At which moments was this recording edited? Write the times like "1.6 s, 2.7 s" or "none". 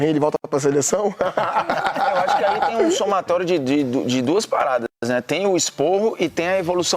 none